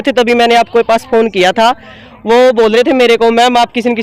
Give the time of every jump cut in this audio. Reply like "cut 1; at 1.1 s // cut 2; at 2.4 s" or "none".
none